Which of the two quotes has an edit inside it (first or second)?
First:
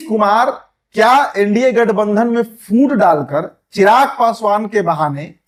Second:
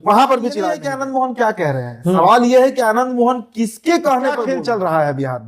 second